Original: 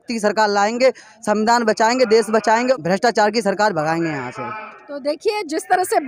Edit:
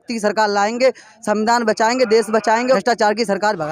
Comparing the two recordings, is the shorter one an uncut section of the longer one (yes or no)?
no